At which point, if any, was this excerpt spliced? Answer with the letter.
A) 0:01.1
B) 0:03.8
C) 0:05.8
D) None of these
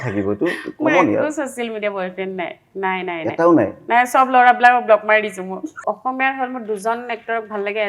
C